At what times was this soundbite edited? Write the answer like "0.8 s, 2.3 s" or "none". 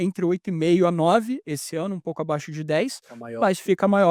none